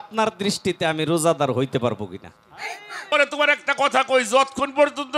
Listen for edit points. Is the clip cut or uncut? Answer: cut